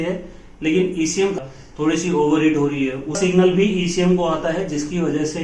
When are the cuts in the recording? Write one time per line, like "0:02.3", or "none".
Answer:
0:01.4
0:03.2